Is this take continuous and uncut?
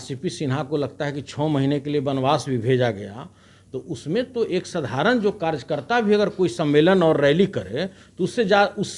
yes; 0 cuts

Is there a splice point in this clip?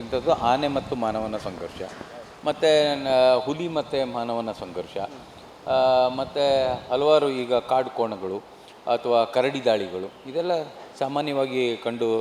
no; 0 cuts

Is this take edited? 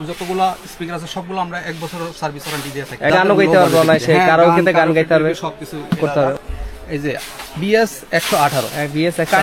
yes; 2 cuts; at 3.1 s, 6.4 s

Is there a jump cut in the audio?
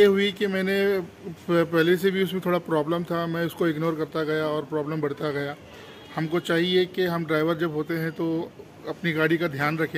no; 0 cuts

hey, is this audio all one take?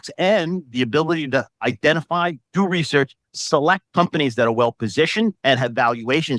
no; 3 cuts; at 1.5 s, 3.8 s, 5.4 s

